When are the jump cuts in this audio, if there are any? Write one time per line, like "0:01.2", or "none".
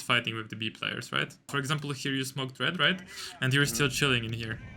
0:01.5